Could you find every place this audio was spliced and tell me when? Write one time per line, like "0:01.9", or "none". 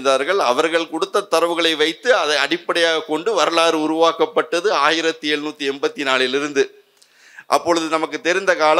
none